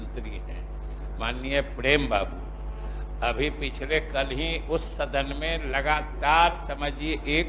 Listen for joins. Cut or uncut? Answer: uncut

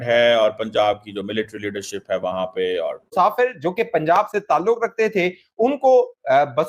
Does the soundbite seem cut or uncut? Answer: cut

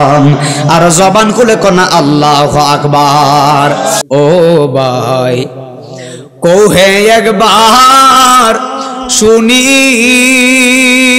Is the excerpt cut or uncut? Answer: cut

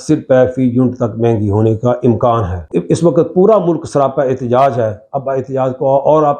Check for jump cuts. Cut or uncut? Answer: cut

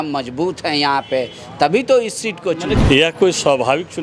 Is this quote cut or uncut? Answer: cut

